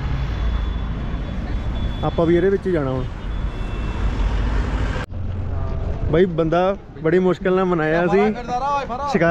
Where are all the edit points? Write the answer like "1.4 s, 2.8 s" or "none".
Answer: 5.0 s